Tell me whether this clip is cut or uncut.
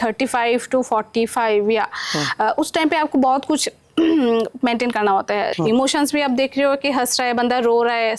cut